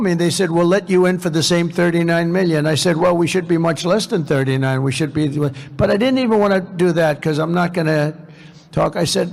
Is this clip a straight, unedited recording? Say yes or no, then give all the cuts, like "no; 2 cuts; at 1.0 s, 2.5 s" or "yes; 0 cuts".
yes; 0 cuts